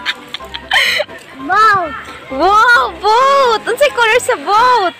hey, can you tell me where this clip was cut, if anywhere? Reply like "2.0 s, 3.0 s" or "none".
1.2 s